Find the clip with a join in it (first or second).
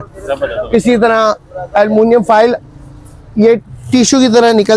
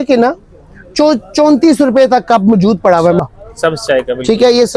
second